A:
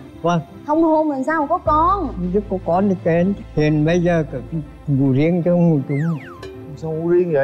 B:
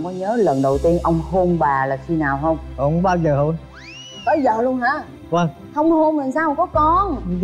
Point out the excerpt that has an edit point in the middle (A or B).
A